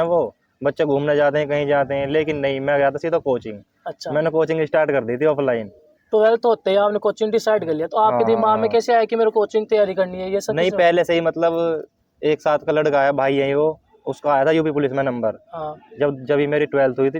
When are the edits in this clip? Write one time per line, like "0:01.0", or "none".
none